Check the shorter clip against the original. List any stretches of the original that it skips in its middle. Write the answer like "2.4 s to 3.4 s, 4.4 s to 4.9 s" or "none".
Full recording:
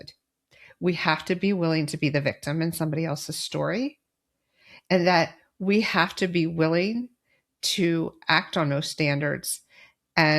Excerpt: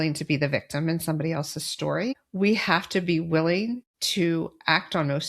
4.0 s to 5.5 s, 7.2 s to 7.6 s